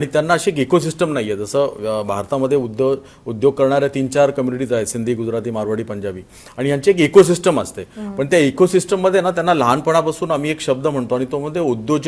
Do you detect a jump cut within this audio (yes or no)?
no